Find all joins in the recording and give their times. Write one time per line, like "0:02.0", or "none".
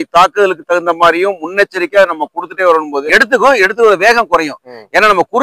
0:02.9